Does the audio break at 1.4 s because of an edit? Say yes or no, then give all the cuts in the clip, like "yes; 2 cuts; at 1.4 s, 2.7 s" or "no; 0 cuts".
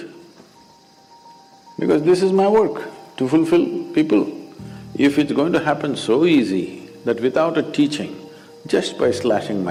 no; 0 cuts